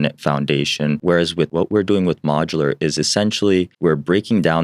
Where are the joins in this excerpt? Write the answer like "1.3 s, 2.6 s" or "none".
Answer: 1.4 s, 3.7 s